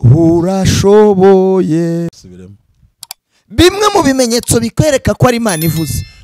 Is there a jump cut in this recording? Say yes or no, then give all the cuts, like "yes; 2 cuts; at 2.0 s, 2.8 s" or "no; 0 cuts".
yes; 1 cut; at 2.1 s